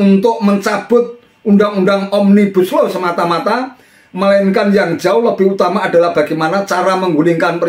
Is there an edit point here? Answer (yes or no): no